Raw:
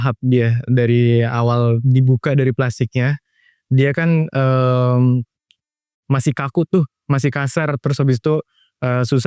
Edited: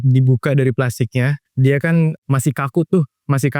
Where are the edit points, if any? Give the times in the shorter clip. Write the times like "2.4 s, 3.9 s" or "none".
1.4 s, 2.2 s